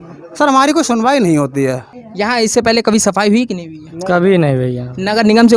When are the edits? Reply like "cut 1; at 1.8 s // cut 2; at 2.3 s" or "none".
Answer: cut 1; at 2.0 s